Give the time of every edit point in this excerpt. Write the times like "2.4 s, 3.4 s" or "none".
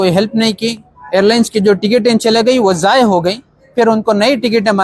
none